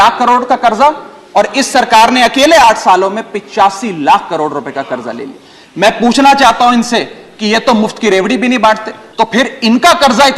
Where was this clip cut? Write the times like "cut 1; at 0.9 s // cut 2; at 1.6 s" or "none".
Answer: cut 1; at 9.0 s